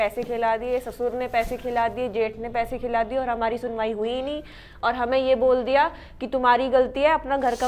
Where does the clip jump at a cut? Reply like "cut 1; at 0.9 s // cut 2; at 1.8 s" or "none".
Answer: none